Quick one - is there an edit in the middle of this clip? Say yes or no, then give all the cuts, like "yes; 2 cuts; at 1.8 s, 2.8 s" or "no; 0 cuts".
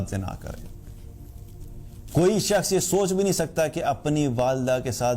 no; 0 cuts